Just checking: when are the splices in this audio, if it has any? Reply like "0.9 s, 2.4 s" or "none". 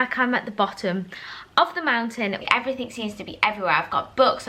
2.4 s

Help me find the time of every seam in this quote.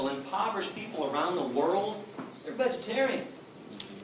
none

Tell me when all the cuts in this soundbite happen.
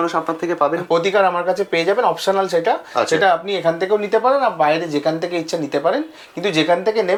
none

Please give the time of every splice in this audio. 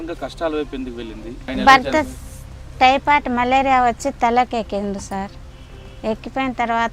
1.5 s

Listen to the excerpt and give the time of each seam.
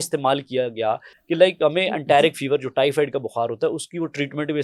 none

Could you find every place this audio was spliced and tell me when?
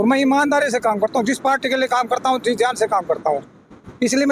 none

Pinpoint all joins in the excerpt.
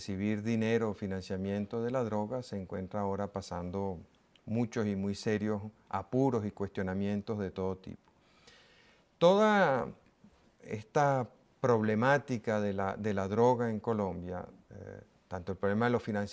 none

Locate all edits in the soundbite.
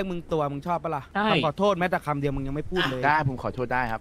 1.1 s

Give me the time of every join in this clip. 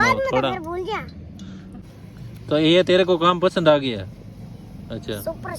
1.8 s

